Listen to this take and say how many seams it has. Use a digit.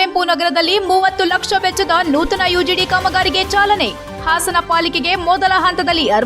0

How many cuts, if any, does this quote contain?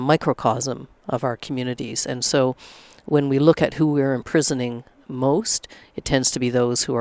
0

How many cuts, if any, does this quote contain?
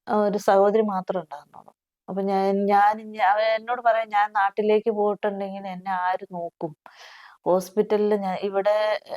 0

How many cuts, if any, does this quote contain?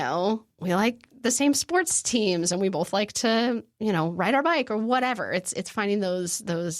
0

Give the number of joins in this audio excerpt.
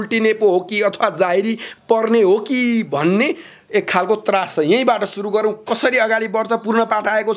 0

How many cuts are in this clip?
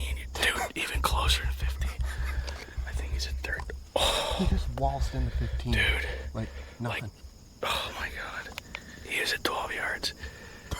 1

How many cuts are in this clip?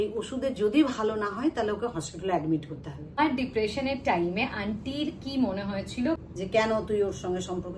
2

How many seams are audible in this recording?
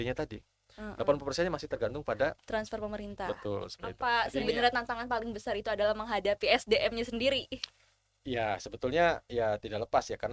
1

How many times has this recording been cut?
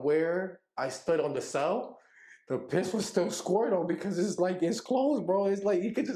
0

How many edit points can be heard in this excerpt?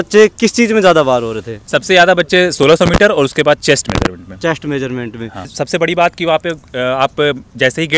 1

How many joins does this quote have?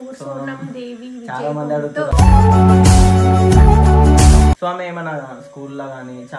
1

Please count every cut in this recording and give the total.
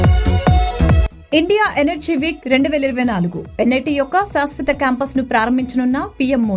1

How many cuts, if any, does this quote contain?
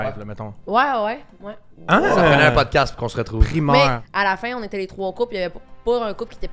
1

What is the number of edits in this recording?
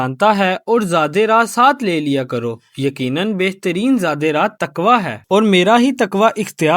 1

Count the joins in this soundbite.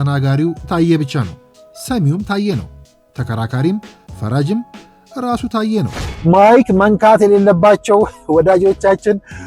1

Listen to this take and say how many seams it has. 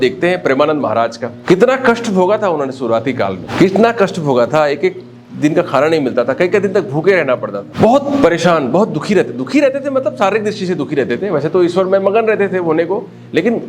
3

